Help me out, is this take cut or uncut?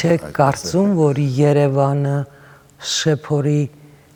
uncut